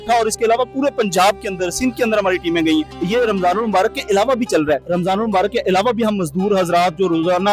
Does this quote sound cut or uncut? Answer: cut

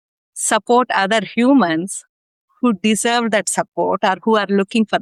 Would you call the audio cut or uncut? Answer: uncut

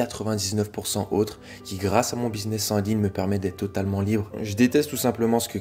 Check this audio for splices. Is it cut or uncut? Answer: cut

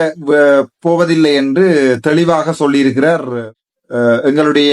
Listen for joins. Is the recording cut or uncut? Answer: cut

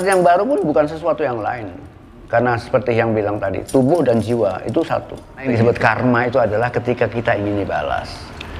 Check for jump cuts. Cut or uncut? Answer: cut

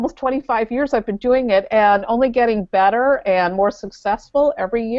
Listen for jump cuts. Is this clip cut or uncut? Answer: uncut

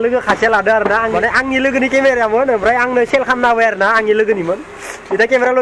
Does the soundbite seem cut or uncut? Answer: cut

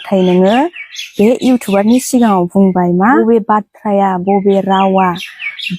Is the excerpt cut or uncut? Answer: cut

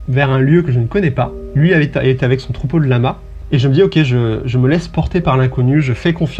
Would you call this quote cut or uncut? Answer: cut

